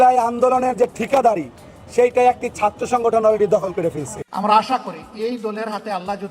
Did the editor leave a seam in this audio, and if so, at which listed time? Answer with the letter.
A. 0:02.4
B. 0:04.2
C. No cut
B